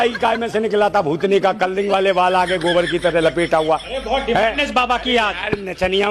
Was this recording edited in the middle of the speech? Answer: no; 0 cuts

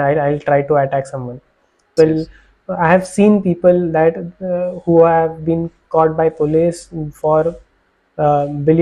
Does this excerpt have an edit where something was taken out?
yes; 1 cut; at 1.9 s

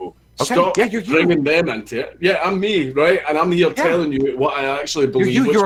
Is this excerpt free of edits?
yes; 0 cuts

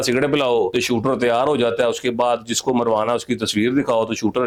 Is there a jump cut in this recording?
no; 0 cuts

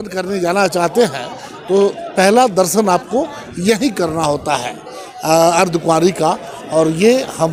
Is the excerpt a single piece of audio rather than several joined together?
yes; 0 cuts

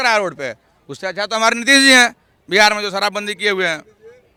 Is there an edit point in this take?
no; 0 cuts

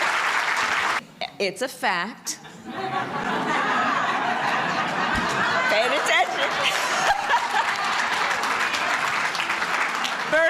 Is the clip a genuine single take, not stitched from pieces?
no; 1 cut; at 1.0 s

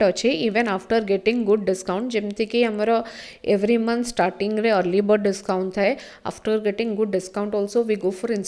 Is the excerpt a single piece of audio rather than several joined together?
yes; 0 cuts

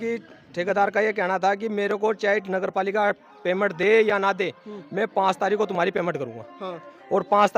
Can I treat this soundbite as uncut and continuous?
yes; 0 cuts

